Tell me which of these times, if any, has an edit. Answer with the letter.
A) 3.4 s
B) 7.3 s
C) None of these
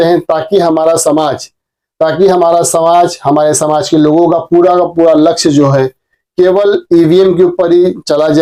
C